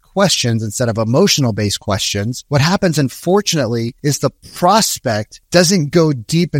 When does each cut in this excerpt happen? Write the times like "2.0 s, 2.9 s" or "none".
2.4 s, 3.9 s, 5.3 s

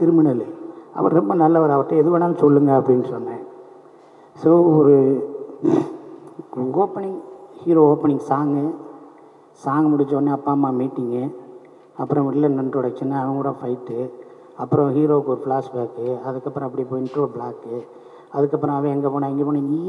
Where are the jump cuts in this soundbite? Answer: none

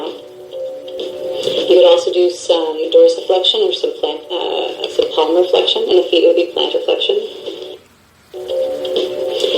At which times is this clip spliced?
8.2 s

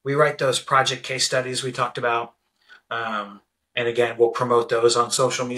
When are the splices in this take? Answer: none

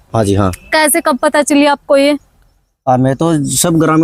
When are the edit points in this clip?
none

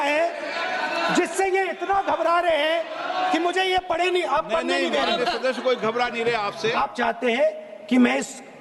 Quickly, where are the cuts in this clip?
none

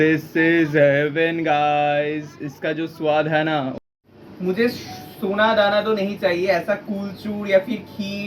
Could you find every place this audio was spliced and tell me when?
3.7 s

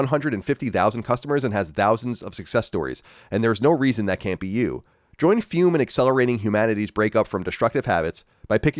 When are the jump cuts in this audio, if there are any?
none

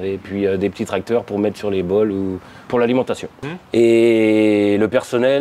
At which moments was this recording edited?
3.3 s

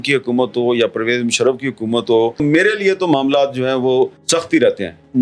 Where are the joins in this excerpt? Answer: 4.2 s

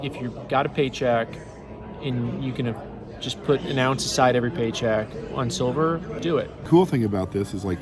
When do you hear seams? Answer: 6.6 s

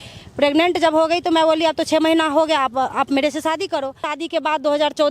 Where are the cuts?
4.2 s

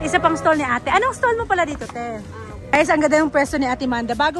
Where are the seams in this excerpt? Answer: 2.7 s

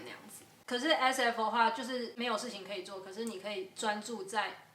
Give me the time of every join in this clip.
2.1 s

